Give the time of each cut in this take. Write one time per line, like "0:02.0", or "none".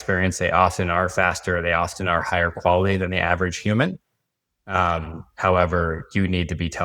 none